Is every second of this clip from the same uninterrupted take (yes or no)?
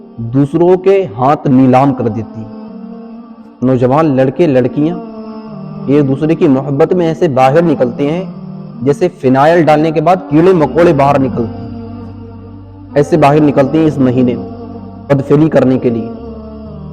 no